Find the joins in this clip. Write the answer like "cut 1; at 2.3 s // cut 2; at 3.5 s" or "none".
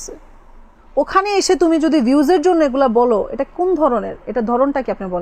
none